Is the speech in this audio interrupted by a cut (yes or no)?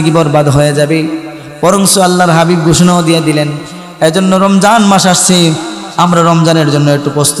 no